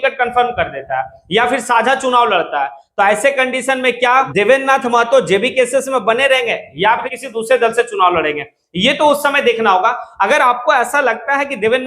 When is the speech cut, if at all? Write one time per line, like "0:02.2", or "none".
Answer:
0:04.3
0:07.2

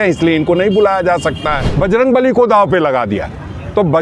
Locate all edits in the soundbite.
0:01.6

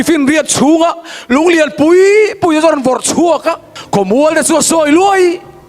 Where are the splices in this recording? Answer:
0:03.7

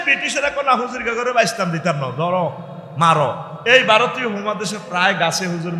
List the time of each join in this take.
0:03.5

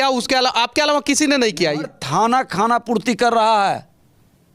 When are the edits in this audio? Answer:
0:01.9

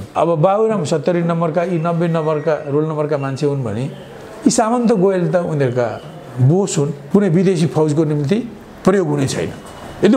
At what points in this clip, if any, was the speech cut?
0:07.0

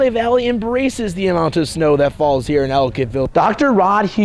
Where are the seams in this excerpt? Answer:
0:03.3

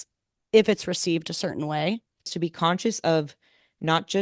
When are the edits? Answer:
0:02.3

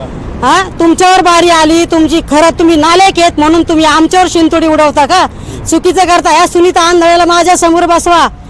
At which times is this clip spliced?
none

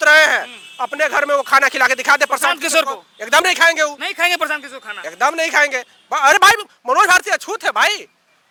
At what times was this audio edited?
none

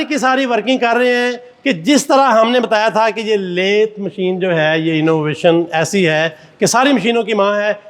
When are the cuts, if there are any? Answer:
none

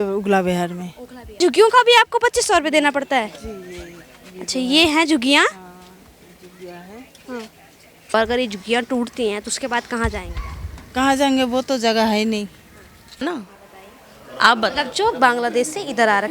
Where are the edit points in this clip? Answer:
0:01.4
0:08.1
0:13.2

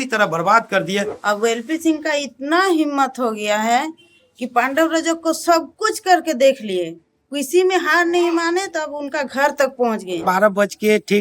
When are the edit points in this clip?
0:01.1
0:10.2

